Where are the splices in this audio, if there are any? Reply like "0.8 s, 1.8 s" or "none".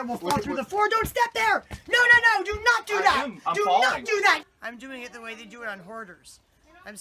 4.5 s

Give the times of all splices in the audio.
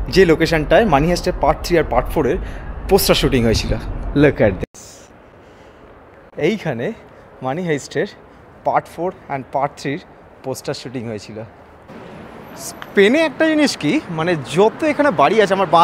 11.9 s

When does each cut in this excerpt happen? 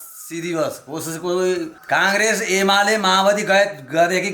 1.8 s

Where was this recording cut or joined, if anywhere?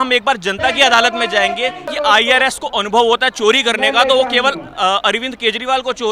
1.9 s

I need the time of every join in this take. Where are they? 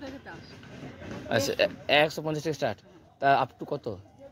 none

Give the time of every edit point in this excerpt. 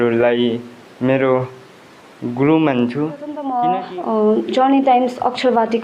3.4 s

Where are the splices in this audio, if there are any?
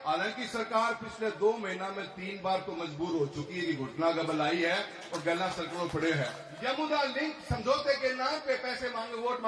6.5 s

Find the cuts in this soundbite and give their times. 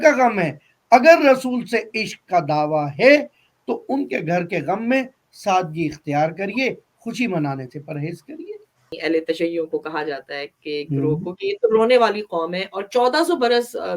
8.9 s

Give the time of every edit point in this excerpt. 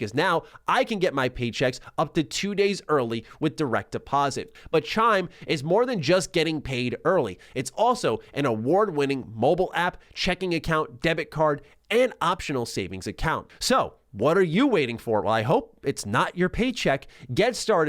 4.5 s, 13.5 s

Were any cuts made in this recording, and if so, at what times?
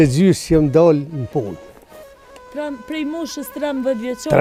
none

